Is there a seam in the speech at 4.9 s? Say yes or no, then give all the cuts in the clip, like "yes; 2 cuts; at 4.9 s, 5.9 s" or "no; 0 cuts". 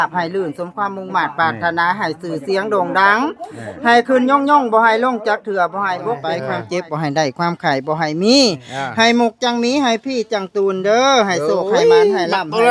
no; 1 cut; at 6.4 s